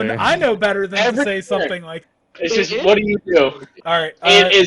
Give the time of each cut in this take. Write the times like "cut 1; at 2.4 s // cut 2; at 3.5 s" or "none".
cut 1; at 2.0 s // cut 2; at 3.7 s